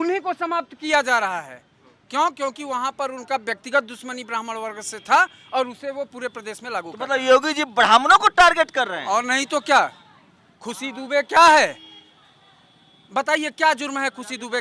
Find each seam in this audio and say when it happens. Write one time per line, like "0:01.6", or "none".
none